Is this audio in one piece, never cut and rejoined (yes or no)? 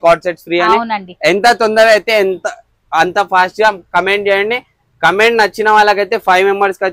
yes